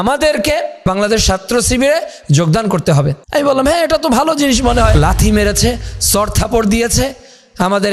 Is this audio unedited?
no; 3 cuts; at 0.8 s, 3.2 s, 4.9 s

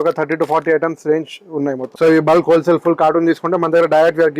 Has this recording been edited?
yes; 1 cut; at 1.8 s

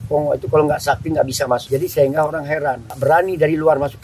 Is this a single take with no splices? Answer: no; 2 cuts; at 1.6 s, 3.0 s

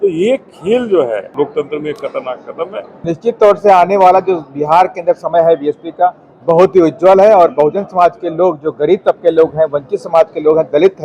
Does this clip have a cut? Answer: yes; 2 cuts; at 1.3 s, 3.0 s

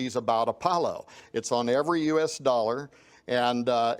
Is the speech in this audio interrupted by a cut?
yes; 1 cut; at 1.2 s

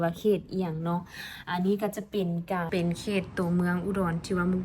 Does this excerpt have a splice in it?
yes; 1 cut; at 2.7 s

